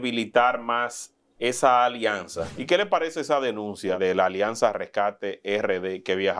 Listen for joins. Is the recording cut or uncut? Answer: cut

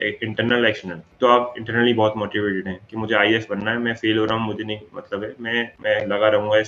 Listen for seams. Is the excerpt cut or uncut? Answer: uncut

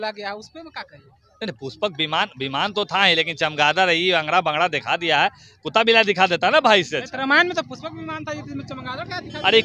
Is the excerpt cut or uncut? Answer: uncut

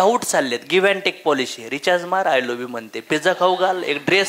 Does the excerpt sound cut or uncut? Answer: uncut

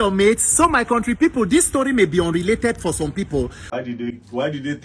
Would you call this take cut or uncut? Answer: cut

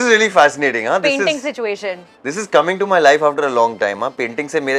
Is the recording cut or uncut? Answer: uncut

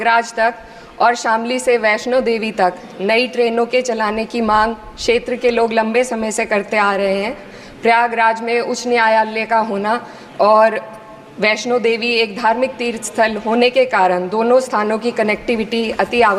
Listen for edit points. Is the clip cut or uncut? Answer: uncut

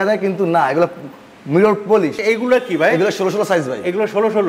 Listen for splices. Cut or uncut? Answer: cut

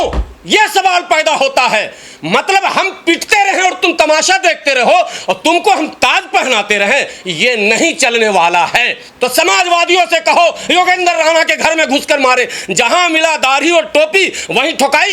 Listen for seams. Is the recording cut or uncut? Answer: cut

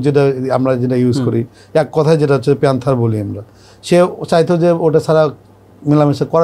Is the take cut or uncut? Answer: uncut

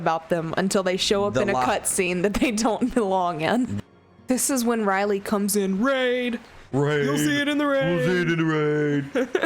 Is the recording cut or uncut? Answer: cut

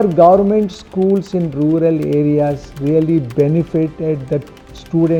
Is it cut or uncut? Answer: uncut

